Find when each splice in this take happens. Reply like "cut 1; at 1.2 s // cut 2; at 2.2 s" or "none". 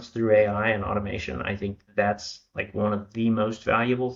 none